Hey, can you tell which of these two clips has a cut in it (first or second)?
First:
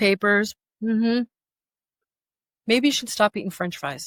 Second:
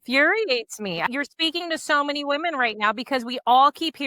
second